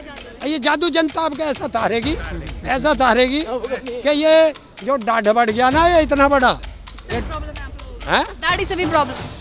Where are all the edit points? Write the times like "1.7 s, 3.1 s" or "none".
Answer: none